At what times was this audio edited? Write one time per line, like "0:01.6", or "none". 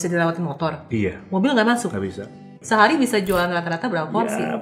0:02.6